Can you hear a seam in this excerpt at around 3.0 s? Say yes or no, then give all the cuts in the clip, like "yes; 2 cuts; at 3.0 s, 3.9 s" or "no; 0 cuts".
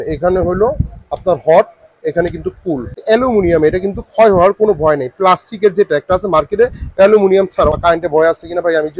yes; 2 cuts; at 3.0 s, 7.7 s